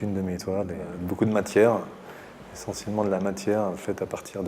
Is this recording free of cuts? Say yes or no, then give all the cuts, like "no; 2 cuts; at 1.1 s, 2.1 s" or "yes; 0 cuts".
no; 1 cut; at 1.0 s